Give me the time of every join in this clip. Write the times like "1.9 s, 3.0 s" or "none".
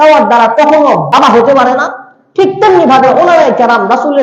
1.1 s